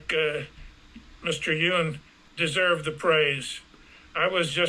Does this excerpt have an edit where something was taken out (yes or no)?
no